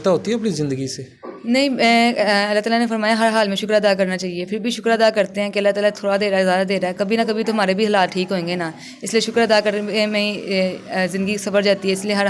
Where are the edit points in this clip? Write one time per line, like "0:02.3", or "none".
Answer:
none

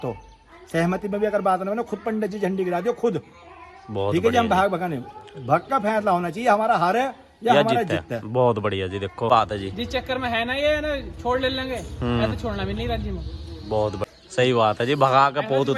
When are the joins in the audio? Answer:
0:09.3
0:14.0

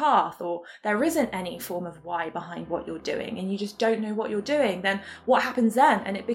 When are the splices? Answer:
none

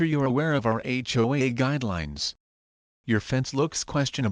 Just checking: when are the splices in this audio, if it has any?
none

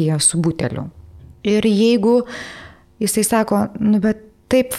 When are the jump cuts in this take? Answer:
0:01.2

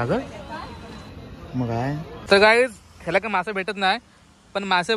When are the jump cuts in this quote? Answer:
0:02.1

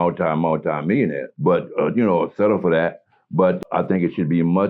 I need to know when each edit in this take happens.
0:01.3
0:03.6

